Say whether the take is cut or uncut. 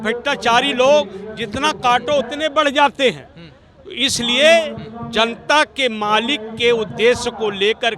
uncut